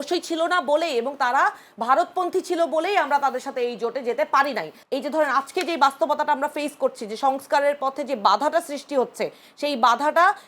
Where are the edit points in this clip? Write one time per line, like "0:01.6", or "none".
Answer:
0:04.8